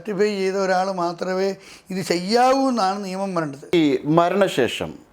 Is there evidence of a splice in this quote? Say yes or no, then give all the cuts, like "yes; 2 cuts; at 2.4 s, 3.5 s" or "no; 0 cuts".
yes; 1 cut; at 3.7 s